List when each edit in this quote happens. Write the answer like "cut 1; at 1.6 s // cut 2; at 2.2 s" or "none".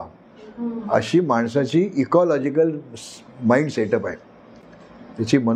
none